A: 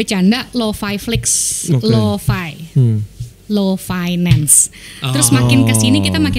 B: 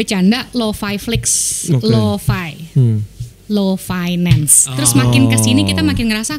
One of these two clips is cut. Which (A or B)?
B